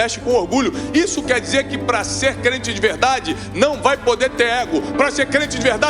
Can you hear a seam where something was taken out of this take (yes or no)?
no